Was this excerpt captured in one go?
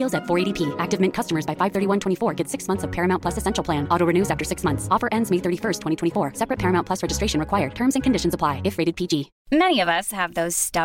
no; 1 cut; at 9.3 s

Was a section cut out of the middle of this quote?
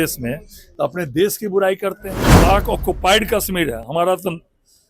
yes; 1 cut; at 2.2 s

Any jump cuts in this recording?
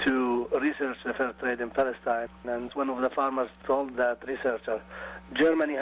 no; 0 cuts

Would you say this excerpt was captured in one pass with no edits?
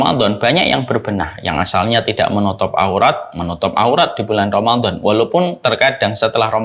yes; 0 cuts

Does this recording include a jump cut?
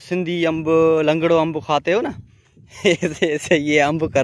no; 0 cuts

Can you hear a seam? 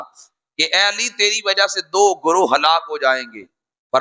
no; 0 cuts

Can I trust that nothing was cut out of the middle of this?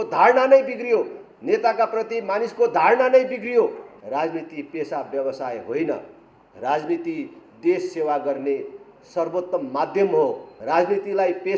no; 2 cuts; at 3.9 s, 10.5 s

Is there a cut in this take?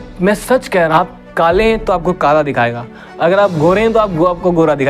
yes; 1 cut; at 0.9 s

